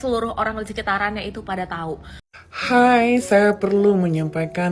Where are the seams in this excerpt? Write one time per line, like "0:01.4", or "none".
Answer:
0:02.4